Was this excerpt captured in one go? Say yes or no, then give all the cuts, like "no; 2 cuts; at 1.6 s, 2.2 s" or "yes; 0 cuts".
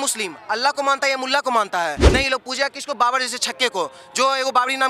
no; 1 cut; at 2.0 s